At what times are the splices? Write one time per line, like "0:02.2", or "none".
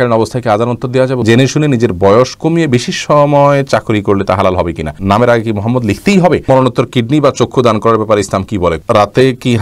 0:01.2
0:05.0
0:06.5
0:08.8